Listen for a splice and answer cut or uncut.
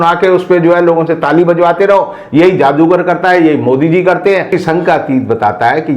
cut